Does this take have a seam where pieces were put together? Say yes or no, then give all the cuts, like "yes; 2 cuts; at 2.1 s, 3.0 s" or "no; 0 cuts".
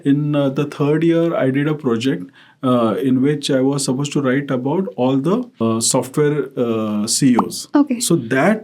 yes; 2 cuts; at 5.6 s, 7.6 s